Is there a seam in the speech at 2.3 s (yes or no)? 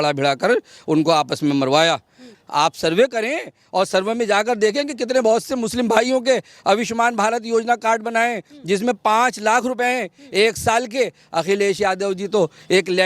yes